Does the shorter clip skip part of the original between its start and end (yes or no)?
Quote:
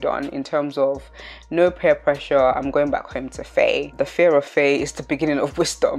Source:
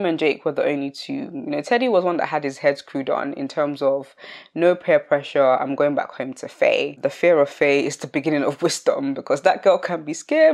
no